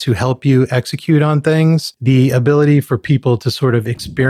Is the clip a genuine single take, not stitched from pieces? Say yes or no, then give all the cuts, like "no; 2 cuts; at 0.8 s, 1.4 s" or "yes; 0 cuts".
no; 1 cut; at 1.9 s